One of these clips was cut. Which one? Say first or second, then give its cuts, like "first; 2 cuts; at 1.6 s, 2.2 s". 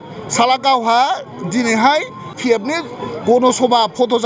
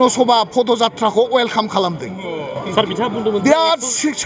first; 1 cut; at 2.4 s